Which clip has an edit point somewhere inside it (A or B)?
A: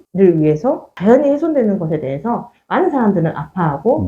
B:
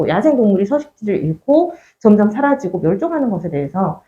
A